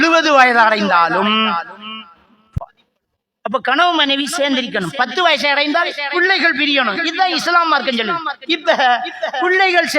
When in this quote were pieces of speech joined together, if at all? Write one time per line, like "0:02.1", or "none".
0:02.4